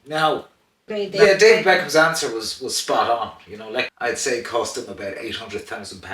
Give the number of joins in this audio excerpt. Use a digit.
2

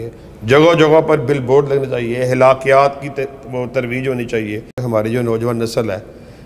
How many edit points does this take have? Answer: 1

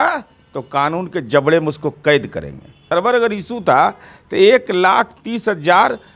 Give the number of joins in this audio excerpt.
1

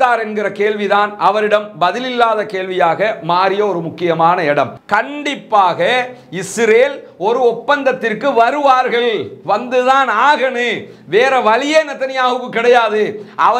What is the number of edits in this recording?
1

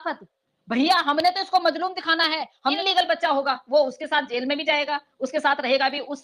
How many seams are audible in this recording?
1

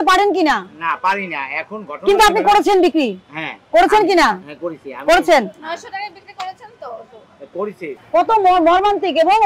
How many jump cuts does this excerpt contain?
1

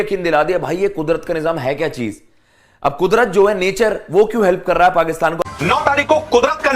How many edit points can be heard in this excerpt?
1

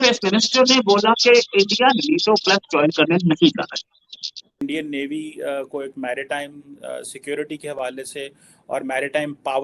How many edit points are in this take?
1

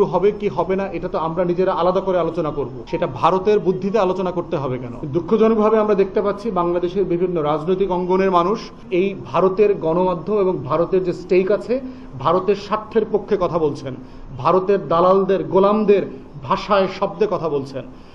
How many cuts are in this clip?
3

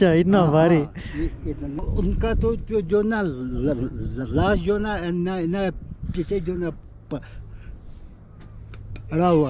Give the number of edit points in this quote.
1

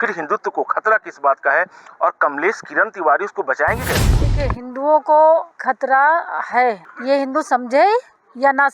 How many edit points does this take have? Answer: 3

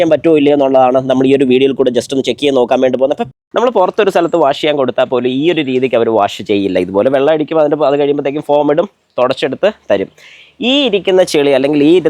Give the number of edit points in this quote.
1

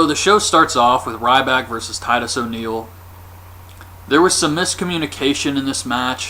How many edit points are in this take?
1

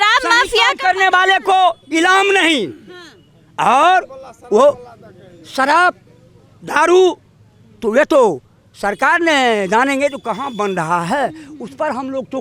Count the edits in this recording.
0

